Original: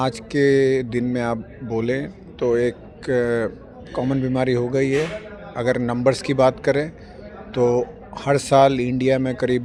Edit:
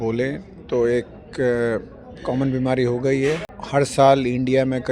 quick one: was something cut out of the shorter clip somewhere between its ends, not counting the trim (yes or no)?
yes